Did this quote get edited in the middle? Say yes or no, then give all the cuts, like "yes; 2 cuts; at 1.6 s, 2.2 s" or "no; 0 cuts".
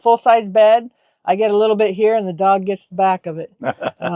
no; 0 cuts